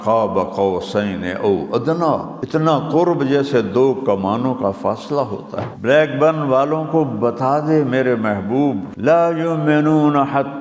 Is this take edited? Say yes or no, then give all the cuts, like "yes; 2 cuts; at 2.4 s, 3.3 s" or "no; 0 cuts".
yes; 3 cuts; at 2.3 s, 5.6 s, 8.9 s